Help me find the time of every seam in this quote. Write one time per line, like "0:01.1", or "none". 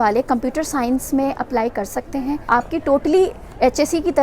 0:02.4